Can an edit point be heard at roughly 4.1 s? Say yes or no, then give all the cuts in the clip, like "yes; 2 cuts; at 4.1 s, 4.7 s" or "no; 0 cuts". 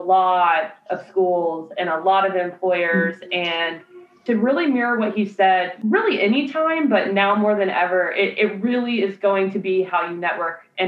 yes; 2 cuts; at 4.1 s, 5.7 s